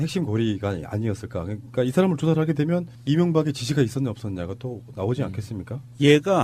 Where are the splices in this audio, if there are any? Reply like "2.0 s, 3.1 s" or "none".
2.5 s